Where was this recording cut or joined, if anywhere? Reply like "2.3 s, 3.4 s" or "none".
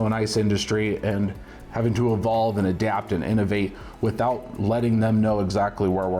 none